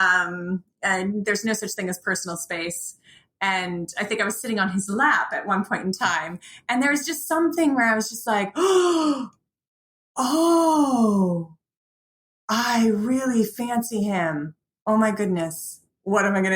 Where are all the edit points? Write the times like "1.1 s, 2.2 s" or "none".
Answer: 14.6 s